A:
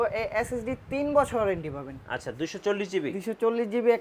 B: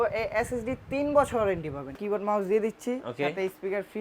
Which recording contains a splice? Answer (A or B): B